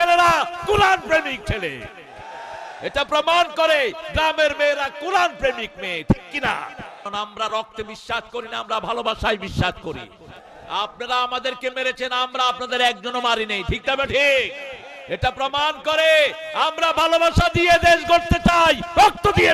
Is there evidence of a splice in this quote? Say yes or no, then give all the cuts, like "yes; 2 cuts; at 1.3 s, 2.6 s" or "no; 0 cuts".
yes; 1 cut; at 7.1 s